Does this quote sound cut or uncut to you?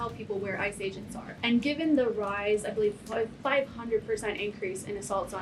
cut